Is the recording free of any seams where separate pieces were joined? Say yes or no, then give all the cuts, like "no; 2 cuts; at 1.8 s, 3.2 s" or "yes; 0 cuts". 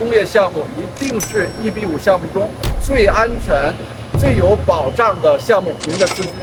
yes; 0 cuts